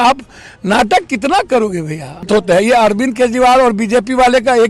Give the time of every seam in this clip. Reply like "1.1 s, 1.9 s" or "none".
2.3 s